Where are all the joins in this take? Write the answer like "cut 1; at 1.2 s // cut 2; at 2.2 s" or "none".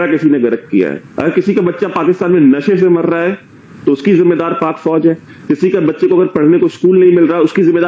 cut 1; at 1.1 s